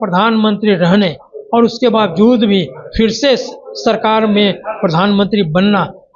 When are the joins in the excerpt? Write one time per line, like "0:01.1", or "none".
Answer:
none